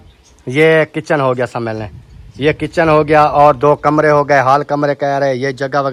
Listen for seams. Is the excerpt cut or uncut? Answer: uncut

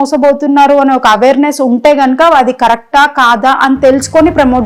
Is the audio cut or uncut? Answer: uncut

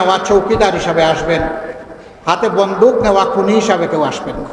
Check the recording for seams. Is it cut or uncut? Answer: uncut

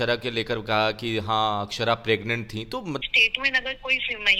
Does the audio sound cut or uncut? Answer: uncut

